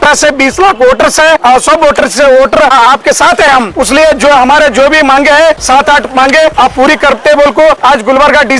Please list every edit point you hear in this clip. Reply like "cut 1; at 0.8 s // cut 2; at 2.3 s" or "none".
cut 1; at 1.4 s // cut 2; at 2.7 s // cut 3; at 3.7 s // cut 4; at 5.6 s // cut 5; at 6.5 s // cut 6; at 7.8 s